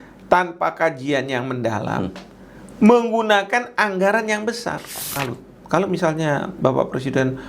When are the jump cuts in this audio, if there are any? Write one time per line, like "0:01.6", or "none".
0:05.1